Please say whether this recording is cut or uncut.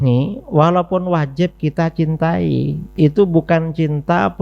cut